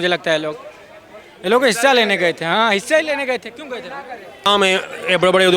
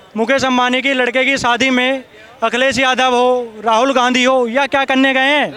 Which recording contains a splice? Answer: first; 1 cut; at 4.5 s

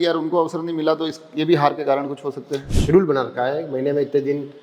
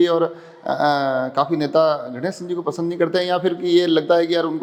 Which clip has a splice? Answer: first; 1 cut; at 2.6 s

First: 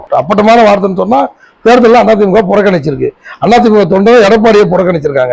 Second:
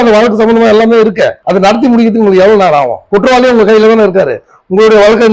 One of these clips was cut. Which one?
second; 2 cuts; at 1.4 s, 3.0 s

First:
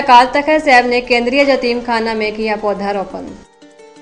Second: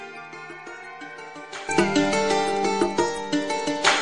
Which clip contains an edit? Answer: second; 1 cut; at 1.6 s

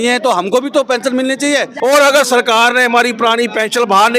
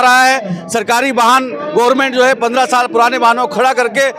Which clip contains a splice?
first; 1 cut; at 1.7 s

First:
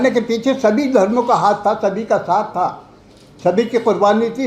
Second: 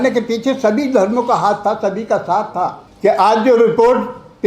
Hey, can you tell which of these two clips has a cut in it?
second; 1 cut; at 2.8 s

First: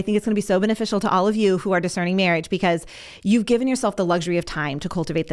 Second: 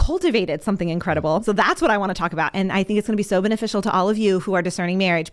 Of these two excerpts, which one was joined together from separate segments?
second; 1 cut; at 1.4 s

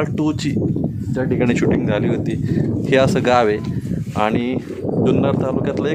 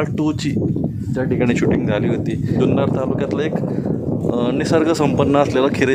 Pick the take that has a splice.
second; 1 cut; at 2.6 s

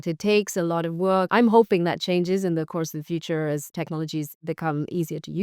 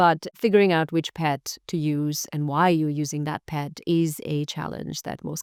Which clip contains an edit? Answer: first; 2 cuts; at 1.3 s, 4.4 s

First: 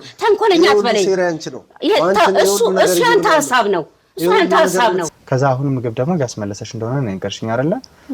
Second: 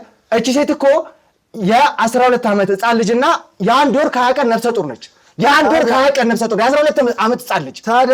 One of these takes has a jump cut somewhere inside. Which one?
first; 1 cut; at 5.1 s

